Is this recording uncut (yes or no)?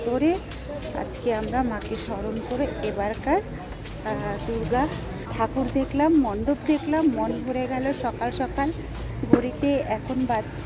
no